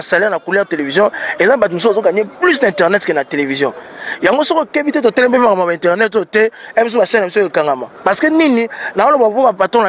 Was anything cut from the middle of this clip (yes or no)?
no